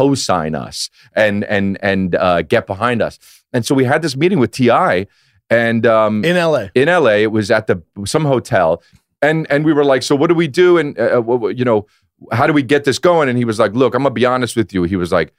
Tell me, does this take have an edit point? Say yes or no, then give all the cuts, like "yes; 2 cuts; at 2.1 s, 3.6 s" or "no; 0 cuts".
yes; 1 cut; at 8.9 s